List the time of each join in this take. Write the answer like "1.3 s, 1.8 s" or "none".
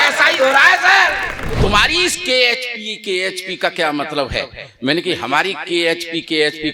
1.6 s